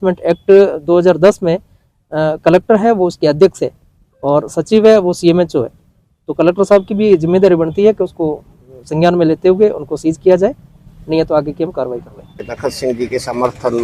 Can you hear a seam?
yes; 1 cut; at 12.4 s

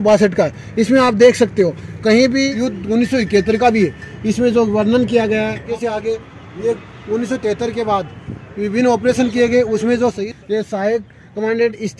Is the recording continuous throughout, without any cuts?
no; 3 cuts; at 2.5 s, 5.7 s, 10.2 s

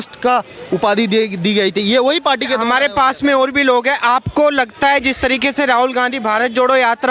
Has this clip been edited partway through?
no; 0 cuts

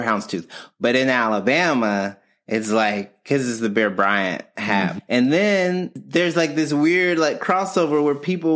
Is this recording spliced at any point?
yes; 2 cuts; at 5.0 s, 6.0 s

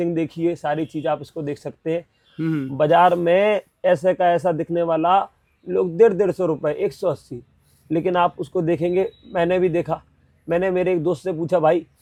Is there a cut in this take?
no; 0 cuts

